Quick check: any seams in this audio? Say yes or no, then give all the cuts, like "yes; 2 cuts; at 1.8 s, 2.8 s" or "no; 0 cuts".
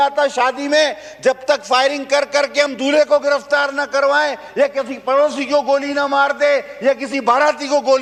no; 0 cuts